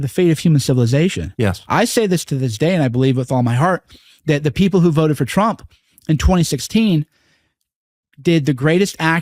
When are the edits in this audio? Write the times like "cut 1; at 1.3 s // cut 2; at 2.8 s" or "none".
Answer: none